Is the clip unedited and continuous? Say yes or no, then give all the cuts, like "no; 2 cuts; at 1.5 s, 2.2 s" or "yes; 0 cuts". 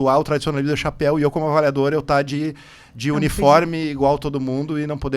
yes; 0 cuts